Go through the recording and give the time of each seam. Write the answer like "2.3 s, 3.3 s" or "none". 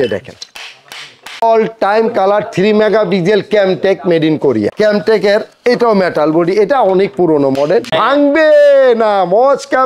1.4 s, 4.7 s, 7.9 s